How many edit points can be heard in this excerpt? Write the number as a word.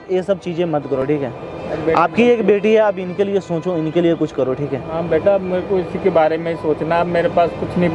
zero